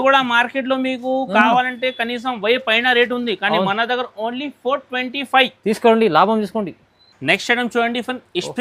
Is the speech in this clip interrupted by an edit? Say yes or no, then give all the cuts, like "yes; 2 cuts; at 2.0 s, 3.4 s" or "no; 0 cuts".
no; 0 cuts